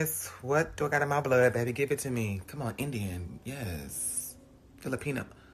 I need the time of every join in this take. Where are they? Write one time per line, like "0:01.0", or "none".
none